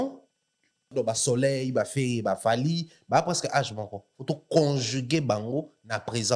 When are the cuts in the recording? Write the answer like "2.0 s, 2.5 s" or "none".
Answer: 0.9 s